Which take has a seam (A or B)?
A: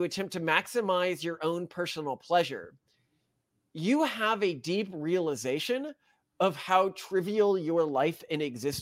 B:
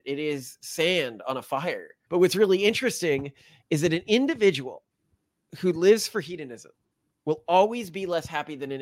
B